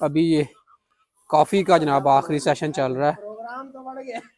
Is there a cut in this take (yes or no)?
no